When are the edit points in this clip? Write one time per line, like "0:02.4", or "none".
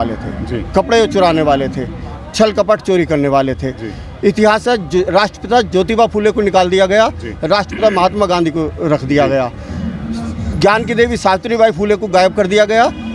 none

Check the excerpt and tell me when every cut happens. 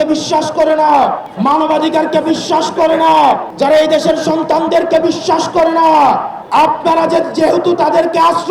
0:01.3
0:03.5
0:06.3

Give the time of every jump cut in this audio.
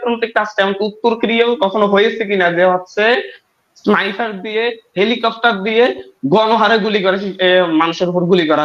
none

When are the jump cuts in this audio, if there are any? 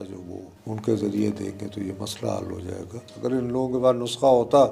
0:03.0

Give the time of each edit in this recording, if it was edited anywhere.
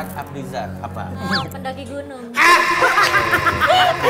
0:01.2

